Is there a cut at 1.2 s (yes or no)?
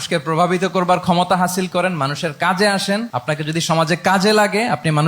no